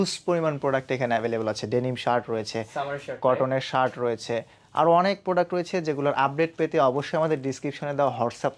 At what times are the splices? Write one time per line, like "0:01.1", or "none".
none